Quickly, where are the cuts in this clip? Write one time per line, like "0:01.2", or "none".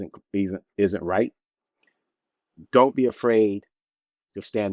none